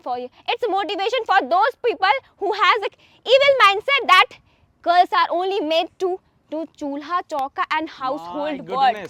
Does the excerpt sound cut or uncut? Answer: uncut